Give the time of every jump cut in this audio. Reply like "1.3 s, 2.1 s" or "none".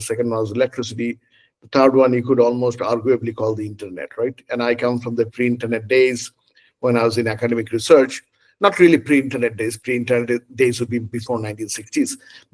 none